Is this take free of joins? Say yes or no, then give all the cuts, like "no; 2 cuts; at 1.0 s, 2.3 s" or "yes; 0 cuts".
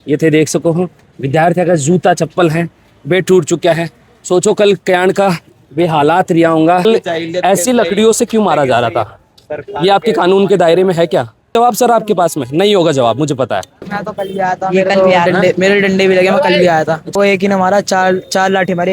no; 4 cuts; at 6.8 s, 11.5 s, 14.0 s, 17.1 s